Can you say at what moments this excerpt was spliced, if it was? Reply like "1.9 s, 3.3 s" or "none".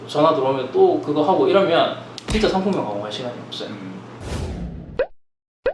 4.1 s